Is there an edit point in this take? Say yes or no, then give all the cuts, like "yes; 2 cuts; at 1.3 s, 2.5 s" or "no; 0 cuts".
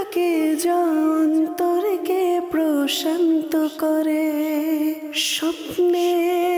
no; 0 cuts